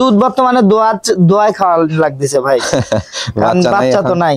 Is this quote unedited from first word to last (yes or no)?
yes